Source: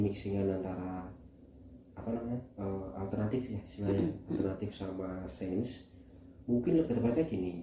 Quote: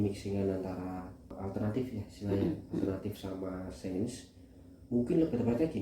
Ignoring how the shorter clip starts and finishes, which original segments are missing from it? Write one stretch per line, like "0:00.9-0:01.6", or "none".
0:01.3-0:02.9

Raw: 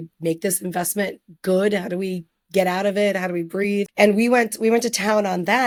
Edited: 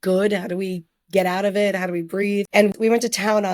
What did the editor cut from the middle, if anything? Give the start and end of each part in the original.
0:04.0-0:04.4

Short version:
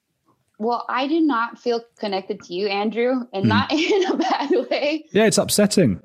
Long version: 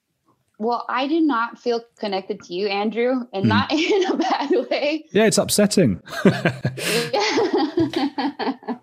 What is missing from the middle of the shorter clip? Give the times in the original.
none

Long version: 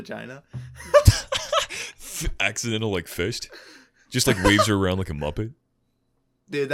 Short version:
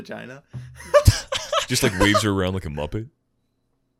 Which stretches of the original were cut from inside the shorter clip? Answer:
0:01.7-0:04.1

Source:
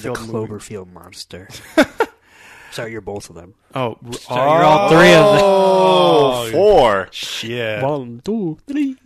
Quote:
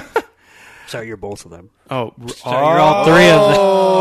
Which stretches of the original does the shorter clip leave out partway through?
none

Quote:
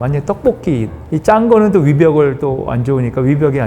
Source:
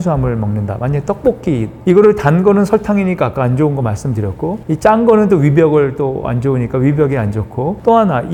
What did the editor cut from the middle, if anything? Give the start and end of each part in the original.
0:01.8-0:04.6

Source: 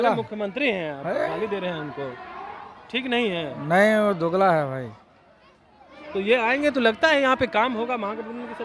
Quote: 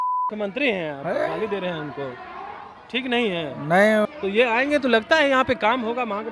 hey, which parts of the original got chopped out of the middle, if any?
0:04.1-0:06.0

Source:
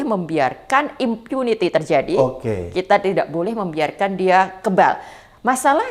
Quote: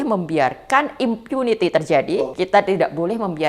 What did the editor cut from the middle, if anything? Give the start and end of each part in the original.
0:02.2-0:02.5

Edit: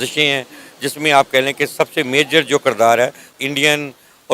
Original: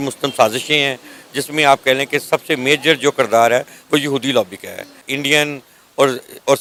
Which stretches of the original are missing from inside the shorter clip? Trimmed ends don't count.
0:03.8-0:04.9

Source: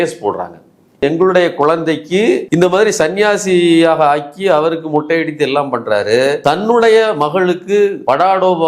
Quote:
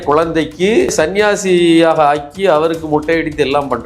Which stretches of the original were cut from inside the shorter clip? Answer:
0:02.4-0:02.9

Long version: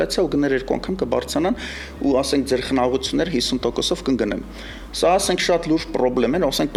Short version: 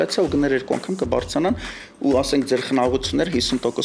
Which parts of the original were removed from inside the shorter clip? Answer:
none

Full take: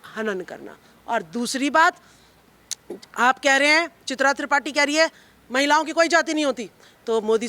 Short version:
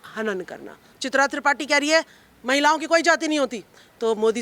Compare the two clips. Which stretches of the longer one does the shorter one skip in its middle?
0:00.9-0:04.0

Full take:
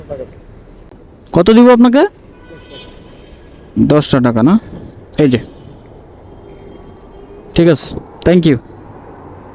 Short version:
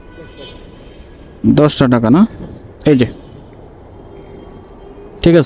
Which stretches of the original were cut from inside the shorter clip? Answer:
none

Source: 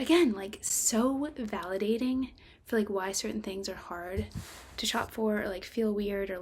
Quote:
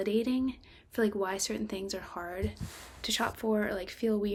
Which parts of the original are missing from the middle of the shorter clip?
none

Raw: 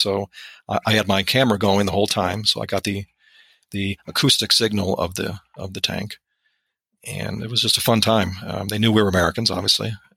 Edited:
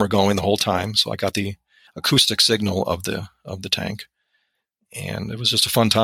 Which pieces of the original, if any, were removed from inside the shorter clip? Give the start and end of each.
0:03.4-0:04.0

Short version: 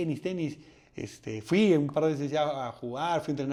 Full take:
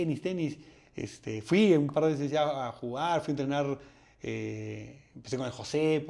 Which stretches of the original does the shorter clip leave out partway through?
none

